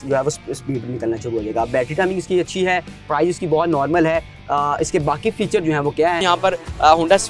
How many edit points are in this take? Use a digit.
1